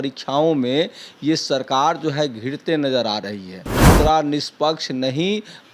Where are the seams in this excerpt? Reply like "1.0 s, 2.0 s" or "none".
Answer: 3.8 s